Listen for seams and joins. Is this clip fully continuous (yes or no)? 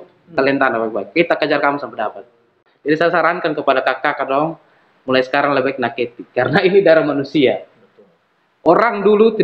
no